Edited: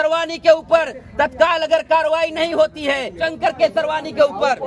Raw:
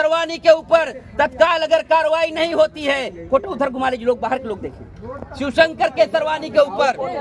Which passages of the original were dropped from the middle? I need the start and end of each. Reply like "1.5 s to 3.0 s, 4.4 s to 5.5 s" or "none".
3.2 s to 5.6 s